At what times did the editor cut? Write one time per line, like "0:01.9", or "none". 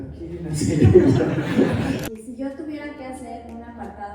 0:02.0